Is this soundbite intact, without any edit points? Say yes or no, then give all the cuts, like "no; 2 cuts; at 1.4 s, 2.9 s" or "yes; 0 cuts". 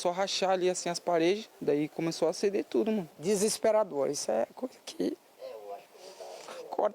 no; 2 cuts; at 1.5 s, 3.1 s